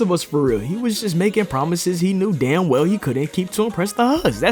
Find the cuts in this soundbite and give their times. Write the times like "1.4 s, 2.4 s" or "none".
none